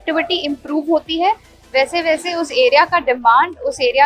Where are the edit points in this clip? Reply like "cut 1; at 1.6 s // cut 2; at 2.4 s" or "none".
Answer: none